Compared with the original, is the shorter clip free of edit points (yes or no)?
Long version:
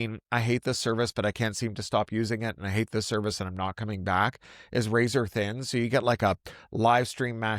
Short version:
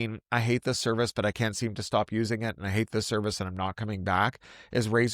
yes